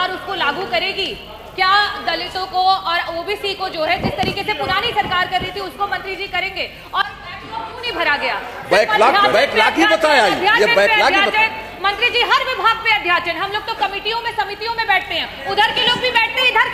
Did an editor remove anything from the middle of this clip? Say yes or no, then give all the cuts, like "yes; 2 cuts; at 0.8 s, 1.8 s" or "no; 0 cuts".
no; 0 cuts